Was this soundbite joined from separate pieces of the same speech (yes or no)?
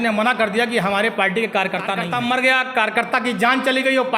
yes